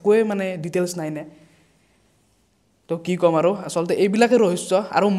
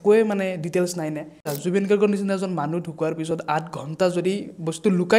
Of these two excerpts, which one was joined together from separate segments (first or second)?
second